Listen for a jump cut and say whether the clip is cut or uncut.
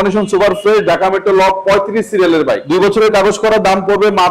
cut